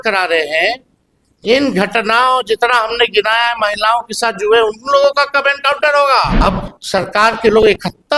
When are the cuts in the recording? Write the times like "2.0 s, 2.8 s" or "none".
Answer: 6.3 s